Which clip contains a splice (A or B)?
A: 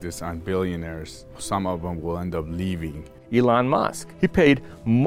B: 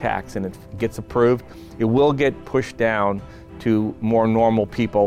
A